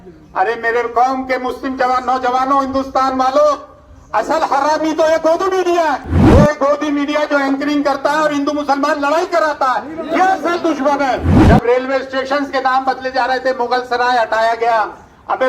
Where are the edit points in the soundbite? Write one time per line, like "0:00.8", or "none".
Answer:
0:06.1
0:11.3